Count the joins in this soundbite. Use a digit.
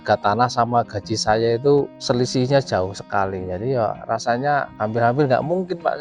2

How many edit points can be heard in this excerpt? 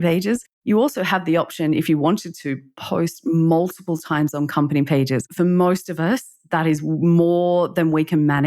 1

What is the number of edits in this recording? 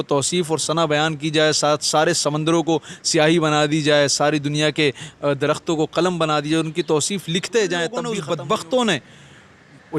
1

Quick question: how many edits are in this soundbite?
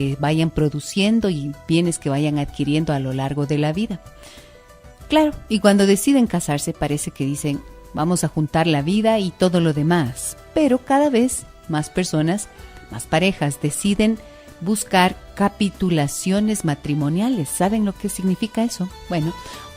1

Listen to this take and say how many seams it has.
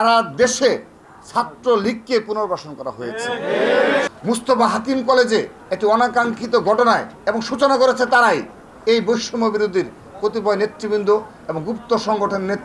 1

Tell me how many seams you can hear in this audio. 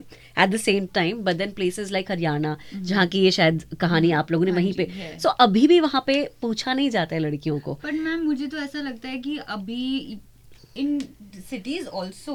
0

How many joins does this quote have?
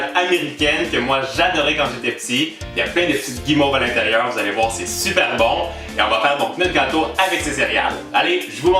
1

